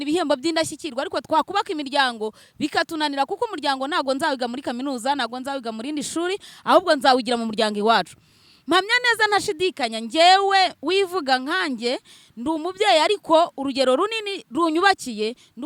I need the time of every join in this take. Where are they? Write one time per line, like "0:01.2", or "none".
none